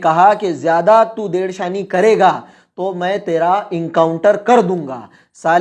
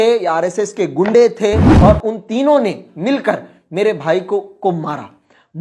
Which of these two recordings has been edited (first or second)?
second